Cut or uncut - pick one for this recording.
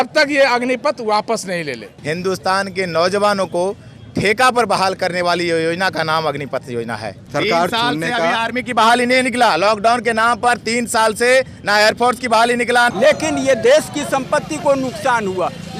cut